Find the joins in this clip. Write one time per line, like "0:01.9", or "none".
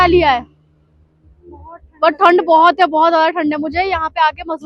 none